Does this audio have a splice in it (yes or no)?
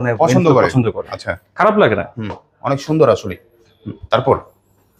no